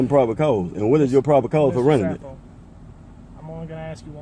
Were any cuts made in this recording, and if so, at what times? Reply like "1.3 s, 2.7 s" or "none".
none